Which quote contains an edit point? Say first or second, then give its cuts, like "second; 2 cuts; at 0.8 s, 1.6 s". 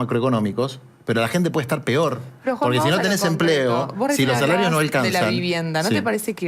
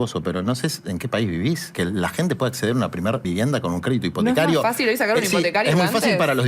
second; 2 cuts; at 1.7 s, 3.2 s